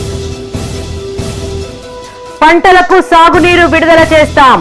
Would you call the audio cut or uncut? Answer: cut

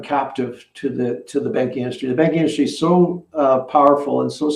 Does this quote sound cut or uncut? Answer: uncut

